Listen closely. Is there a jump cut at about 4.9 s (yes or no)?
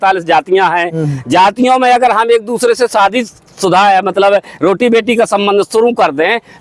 no